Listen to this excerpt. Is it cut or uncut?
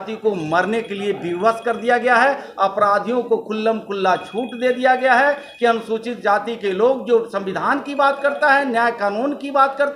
uncut